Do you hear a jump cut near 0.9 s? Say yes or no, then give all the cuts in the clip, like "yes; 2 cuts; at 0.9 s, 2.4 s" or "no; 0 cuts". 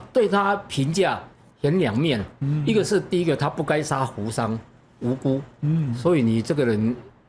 no; 0 cuts